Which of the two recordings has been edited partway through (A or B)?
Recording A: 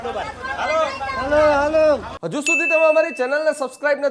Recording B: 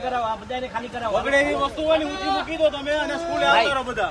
A